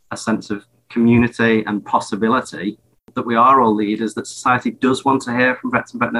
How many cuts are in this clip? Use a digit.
1